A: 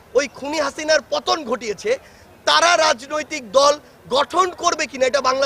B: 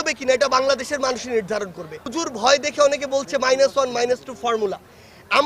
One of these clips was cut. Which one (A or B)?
B